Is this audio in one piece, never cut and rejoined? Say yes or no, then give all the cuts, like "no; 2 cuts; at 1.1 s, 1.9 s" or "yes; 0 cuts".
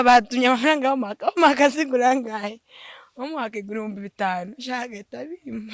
yes; 0 cuts